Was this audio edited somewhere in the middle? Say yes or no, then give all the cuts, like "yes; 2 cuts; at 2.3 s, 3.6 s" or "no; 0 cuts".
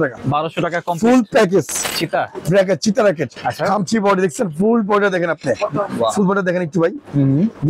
yes; 1 cut; at 1.8 s